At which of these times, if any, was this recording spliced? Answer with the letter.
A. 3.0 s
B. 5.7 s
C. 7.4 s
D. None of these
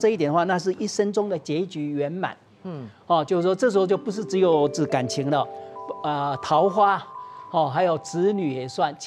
D